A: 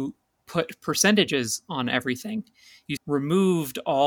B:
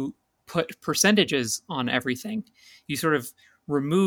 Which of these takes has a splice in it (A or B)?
A